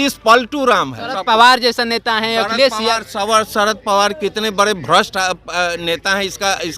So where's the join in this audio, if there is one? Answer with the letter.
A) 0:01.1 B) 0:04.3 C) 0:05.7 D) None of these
A